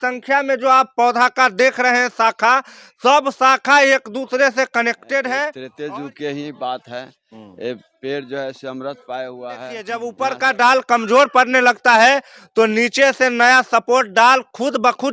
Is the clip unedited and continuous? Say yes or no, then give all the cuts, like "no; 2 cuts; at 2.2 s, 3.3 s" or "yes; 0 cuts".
no; 2 cuts; at 5.7 s, 9.9 s